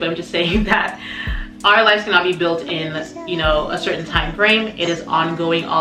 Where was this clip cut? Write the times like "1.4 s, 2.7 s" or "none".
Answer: none